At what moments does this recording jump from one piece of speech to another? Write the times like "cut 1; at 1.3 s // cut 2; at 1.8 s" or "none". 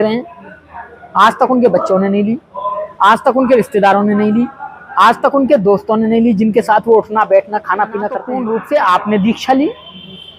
cut 1; at 8.3 s